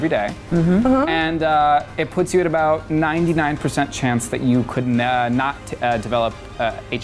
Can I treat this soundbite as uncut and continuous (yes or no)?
yes